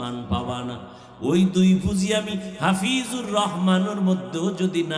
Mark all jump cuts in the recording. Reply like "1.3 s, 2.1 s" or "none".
none